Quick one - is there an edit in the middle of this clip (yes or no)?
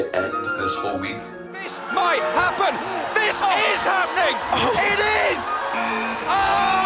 yes